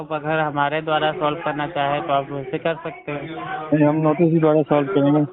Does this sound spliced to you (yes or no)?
no